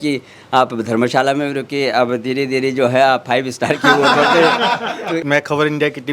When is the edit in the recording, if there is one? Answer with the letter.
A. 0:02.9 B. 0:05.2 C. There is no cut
B